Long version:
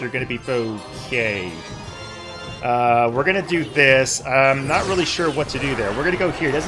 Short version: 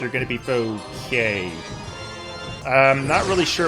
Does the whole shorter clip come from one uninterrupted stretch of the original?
no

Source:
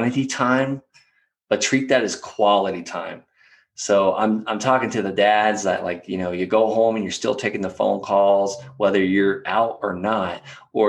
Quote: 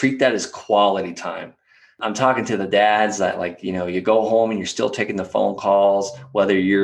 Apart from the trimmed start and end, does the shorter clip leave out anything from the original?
yes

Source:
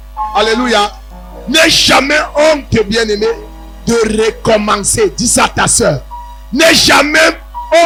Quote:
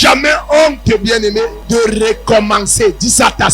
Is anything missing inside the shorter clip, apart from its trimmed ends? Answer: yes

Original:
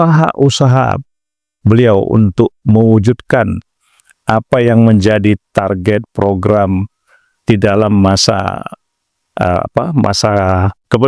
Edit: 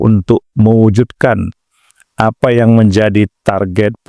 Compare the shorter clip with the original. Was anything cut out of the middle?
no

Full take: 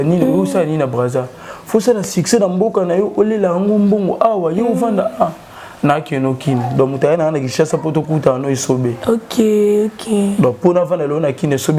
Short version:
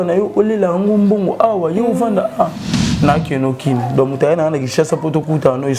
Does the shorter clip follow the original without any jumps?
yes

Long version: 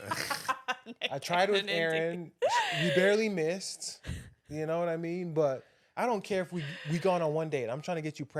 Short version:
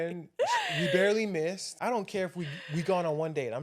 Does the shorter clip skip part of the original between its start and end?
yes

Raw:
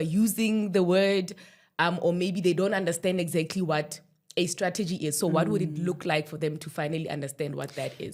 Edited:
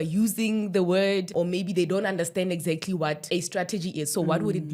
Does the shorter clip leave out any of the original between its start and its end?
yes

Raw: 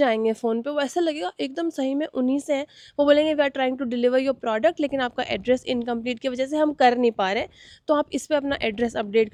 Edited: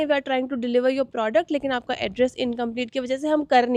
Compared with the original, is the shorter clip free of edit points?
yes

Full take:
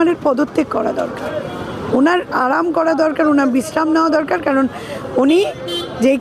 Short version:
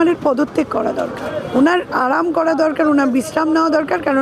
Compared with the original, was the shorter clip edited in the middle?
yes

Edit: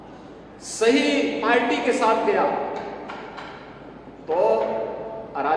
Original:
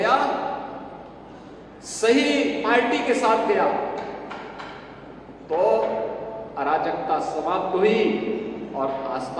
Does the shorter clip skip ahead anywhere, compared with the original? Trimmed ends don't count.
no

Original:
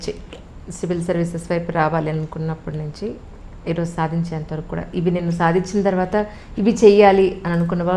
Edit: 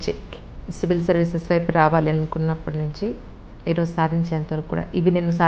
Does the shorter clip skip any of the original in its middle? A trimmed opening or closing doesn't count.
no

